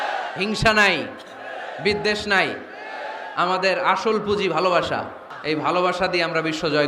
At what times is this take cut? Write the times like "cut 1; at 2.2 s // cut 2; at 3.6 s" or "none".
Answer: cut 1; at 5.3 s